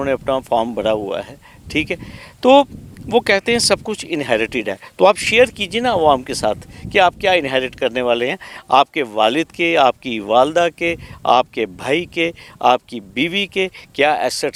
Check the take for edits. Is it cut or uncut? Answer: uncut